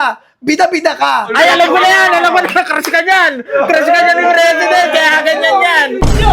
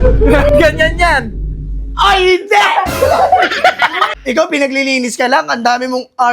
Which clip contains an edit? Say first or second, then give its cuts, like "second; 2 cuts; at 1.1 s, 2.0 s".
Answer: second; 1 cut; at 4.1 s